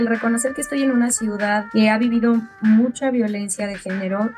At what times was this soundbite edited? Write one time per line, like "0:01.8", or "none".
0:01.7